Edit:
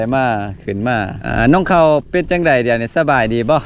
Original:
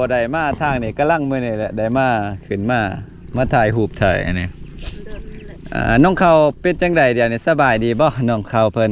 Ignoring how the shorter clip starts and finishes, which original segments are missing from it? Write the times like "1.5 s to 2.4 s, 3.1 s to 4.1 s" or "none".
3.0 s to 5.7 s